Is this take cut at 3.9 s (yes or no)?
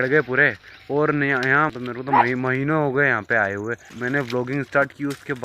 yes